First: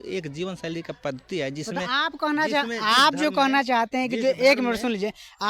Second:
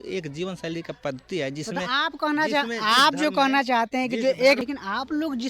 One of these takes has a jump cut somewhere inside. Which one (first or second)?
second